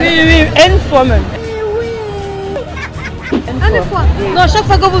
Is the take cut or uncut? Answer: uncut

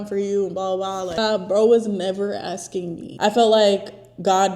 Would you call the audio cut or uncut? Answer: cut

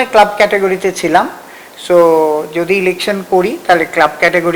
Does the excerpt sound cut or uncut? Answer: uncut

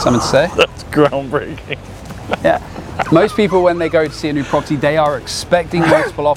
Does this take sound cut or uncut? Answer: uncut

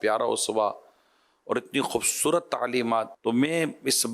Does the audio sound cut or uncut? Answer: uncut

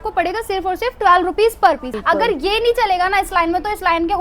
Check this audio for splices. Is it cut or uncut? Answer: cut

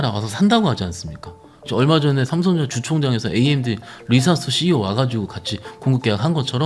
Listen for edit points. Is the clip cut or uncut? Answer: cut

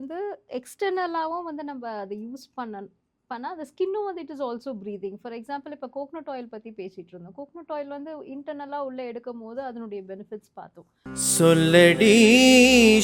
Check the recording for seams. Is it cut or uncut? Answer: cut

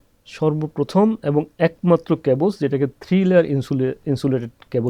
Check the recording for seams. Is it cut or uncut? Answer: uncut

